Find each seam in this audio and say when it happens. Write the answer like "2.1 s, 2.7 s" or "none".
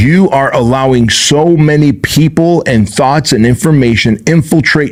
none